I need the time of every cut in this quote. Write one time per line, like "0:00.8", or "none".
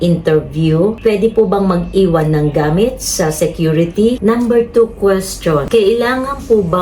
0:01.0
0:04.2
0:05.6